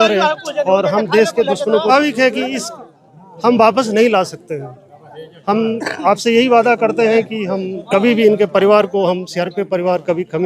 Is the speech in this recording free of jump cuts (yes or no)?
no